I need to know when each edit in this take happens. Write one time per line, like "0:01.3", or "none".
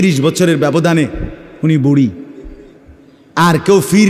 none